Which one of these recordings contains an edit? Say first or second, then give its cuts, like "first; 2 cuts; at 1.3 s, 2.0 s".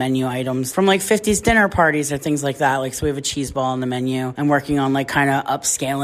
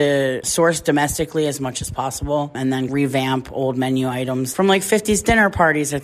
second; 1 cut; at 2.9 s